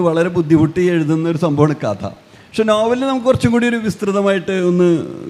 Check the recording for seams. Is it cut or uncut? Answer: uncut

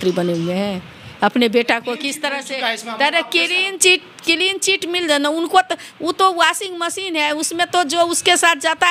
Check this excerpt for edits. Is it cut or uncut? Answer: uncut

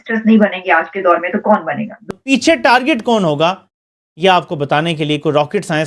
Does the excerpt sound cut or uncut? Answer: cut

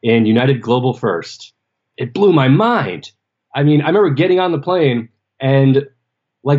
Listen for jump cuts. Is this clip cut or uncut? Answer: cut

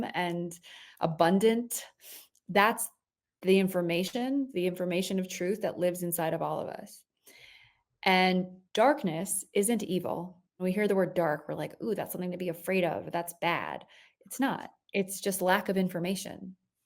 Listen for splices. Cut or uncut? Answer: cut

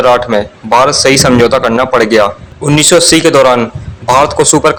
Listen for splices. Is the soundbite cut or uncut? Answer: uncut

